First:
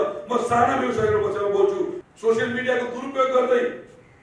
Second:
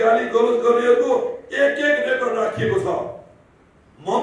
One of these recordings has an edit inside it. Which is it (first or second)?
first